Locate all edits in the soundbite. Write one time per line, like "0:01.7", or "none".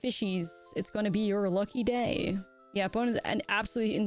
0:02.6

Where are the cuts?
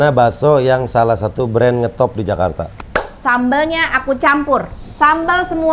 0:02.7

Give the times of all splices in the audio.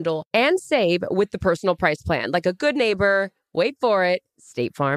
none

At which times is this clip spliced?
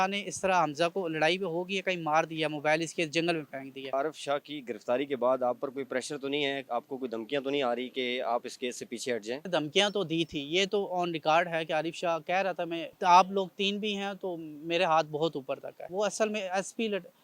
0:03.9
0:09.4
0:12.9
0:15.9

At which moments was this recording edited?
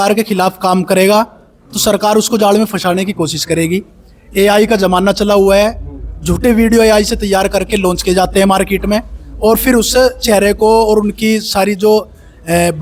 none

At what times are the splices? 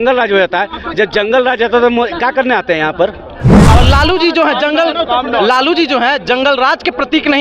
0:03.7

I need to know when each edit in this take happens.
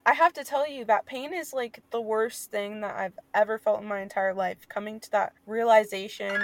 0:01.8
0:03.2
0:05.4

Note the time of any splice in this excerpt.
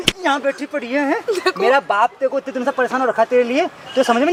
none

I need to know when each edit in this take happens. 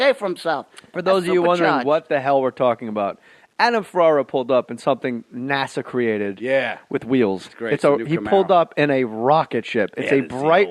none

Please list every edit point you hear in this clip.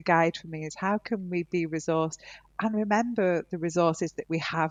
none

